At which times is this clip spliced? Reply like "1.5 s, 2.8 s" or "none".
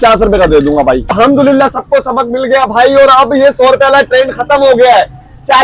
1.1 s